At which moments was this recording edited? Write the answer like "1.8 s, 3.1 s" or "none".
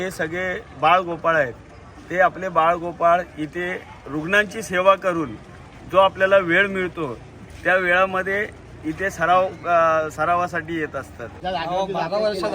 11.2 s